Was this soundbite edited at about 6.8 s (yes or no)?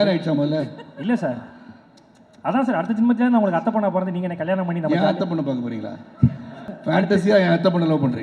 yes